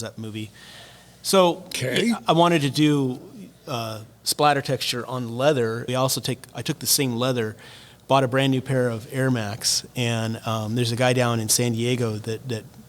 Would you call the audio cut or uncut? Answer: cut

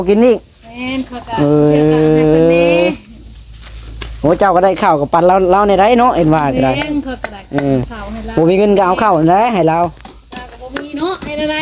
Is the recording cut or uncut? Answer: uncut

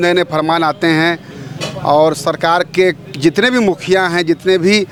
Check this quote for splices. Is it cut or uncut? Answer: uncut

